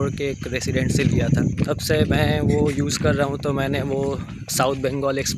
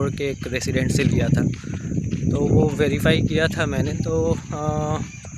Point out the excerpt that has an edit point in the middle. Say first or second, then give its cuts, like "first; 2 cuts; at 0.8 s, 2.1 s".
first; 1 cut; at 1.6 s